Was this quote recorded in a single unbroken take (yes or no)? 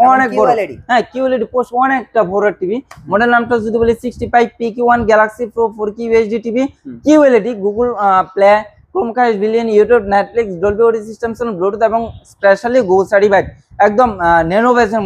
yes